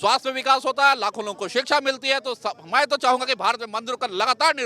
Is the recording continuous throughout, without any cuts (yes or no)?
yes